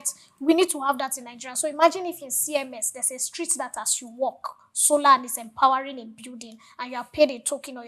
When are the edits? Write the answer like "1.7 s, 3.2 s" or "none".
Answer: none

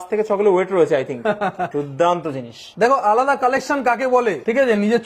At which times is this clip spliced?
none

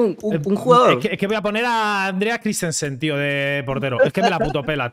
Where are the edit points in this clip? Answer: none

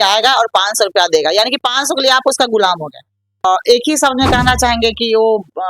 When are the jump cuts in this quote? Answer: 3.4 s

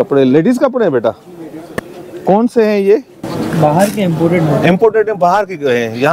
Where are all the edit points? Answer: none

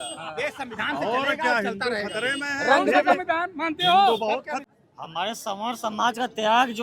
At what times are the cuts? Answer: 4.7 s

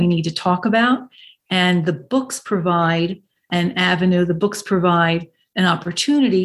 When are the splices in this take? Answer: none

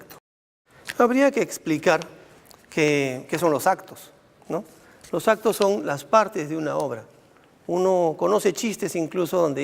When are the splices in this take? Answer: 3.9 s

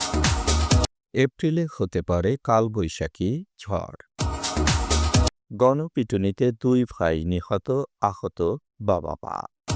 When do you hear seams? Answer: 1.0 s

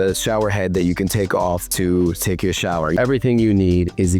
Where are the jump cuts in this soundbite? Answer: 1.7 s, 2.9 s

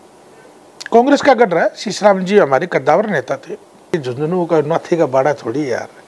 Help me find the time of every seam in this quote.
3.9 s

